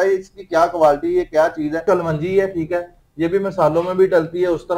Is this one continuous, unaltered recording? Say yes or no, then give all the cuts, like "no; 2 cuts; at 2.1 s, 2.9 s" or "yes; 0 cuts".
no; 1 cut; at 1.8 s